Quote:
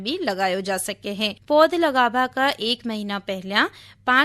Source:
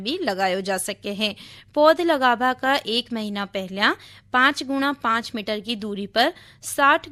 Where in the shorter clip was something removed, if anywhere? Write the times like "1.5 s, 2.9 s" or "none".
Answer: 1.4 s